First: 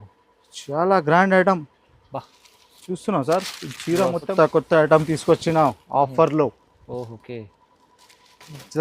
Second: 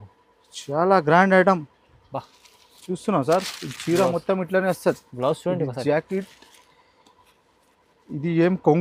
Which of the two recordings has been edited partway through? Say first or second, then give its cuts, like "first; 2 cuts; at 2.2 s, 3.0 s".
first; 1 cut; at 4.3 s